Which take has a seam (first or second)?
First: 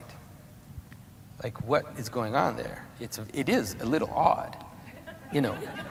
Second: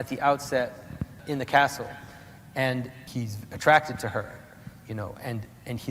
second